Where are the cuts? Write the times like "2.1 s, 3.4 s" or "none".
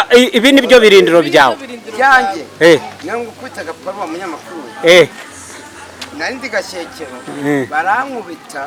none